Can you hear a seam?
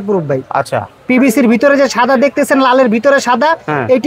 no; 0 cuts

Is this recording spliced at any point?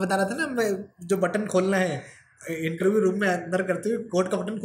no; 0 cuts

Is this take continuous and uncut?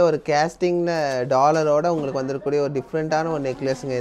yes; 0 cuts

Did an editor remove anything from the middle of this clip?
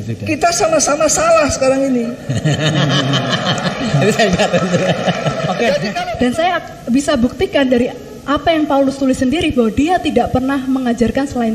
yes; 1 cut; at 6.0 s

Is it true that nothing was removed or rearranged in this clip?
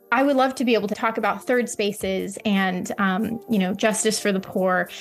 no; 1 cut; at 0.9 s

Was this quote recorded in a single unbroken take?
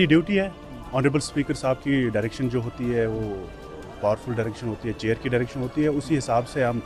yes; 0 cuts

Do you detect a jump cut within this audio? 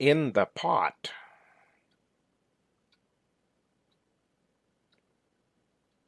no; 0 cuts

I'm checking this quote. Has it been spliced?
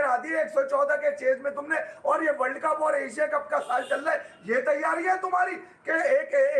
no; 0 cuts

